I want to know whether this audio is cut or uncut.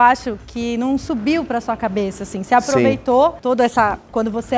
uncut